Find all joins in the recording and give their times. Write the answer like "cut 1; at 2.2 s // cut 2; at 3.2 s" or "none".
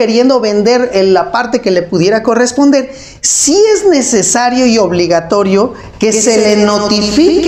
none